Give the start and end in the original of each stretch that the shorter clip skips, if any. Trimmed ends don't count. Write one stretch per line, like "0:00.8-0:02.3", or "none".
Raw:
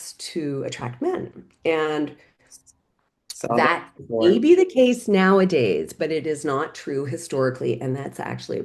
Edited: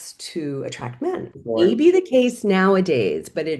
0:01.3-0:04.0